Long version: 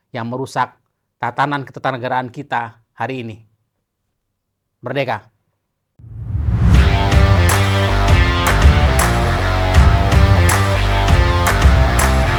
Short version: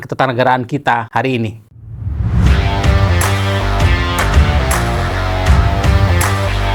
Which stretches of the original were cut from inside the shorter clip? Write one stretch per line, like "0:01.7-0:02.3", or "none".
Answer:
0:02.8-0:05.5